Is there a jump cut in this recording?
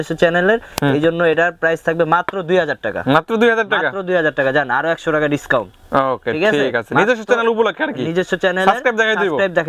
no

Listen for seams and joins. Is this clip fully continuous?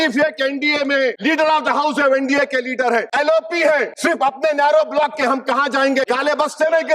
no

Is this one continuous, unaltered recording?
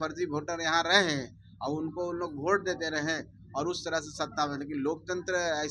yes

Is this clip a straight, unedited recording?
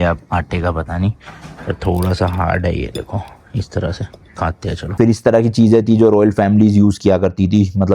no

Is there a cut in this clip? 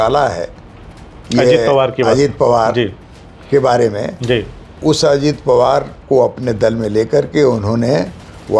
no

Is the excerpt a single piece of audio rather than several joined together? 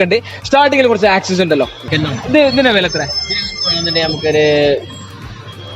no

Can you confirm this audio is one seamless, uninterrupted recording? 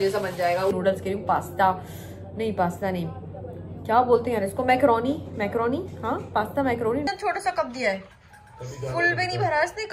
no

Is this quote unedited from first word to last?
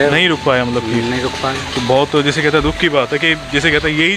yes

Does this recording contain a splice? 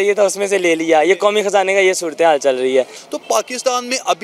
yes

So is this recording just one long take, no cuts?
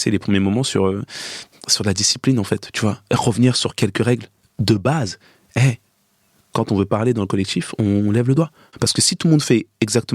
no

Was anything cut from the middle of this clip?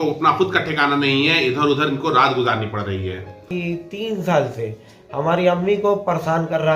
yes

